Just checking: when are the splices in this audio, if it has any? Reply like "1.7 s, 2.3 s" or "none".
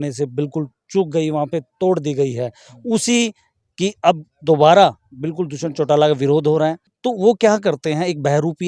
6.9 s